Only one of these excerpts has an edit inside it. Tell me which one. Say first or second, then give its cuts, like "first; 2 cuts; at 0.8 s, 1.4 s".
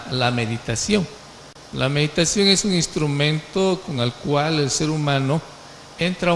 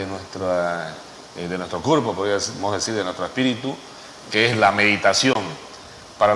second; 1 cut; at 4.3 s